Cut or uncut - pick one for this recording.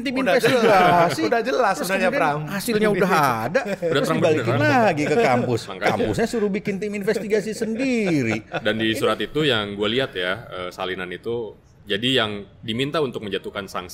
uncut